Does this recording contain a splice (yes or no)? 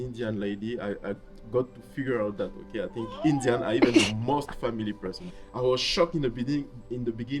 yes